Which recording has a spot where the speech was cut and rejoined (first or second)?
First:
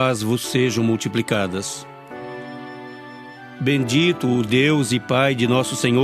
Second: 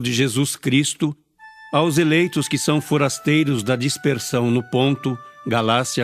first